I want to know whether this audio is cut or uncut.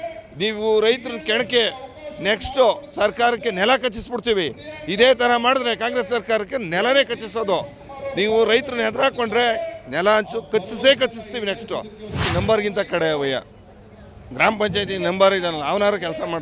cut